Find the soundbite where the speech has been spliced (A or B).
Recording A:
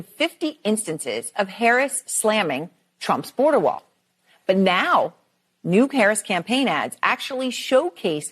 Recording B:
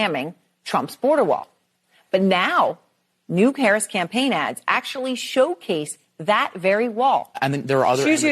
B